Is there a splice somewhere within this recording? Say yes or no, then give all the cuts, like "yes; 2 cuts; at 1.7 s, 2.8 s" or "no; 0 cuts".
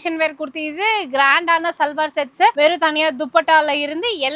no; 0 cuts